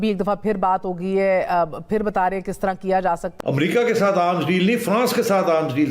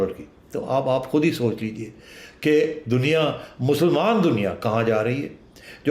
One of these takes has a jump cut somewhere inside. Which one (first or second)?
first